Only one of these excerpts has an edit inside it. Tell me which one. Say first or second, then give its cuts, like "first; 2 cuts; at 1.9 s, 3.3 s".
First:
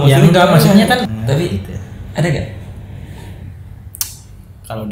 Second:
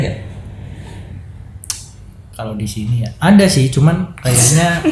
first; 1 cut; at 1.2 s